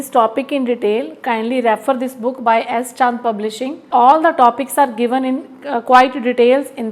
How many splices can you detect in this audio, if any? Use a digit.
1